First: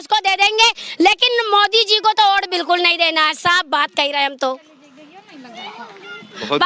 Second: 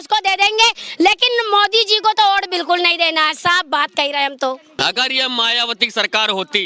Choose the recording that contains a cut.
second; 1 cut; at 4.8 s

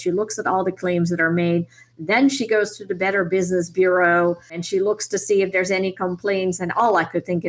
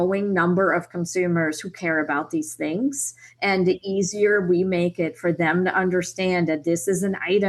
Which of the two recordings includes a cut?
first; 1 cut; at 4.6 s

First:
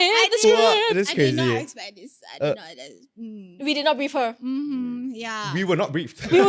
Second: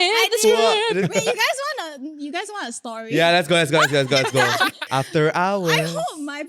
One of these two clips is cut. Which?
second; 2 cuts; at 1.0 s, 4.9 s

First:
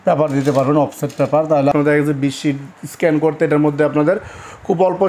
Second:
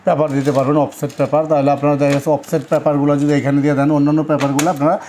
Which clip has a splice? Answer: first; 1 cut; at 1.7 s

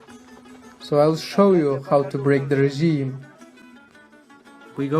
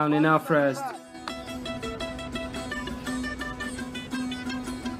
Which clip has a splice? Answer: first; 1 cut; at 1.5 s

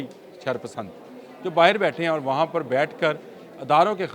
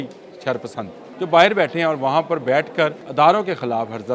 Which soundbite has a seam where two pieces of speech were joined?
second; 2 cuts; at 1.0 s, 3.0 s

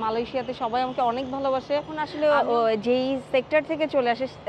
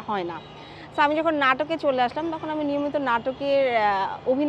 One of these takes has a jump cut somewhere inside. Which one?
first; 1 cut; at 2.0 s

